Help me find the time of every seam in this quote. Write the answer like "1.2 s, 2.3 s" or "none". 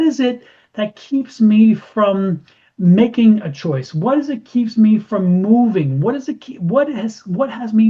none